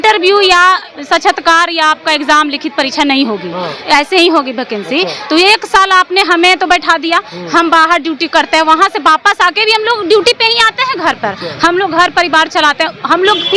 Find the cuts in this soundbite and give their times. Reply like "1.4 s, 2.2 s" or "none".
none